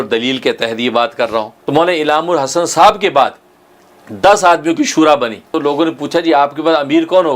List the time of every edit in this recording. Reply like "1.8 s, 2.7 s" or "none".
1.6 s, 5.5 s